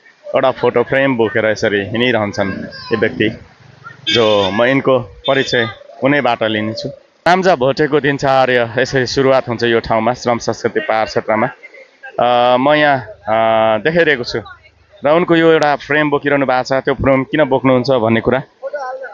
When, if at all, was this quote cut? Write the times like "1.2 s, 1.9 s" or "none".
7.2 s